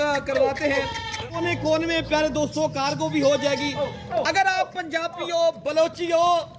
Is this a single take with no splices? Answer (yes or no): no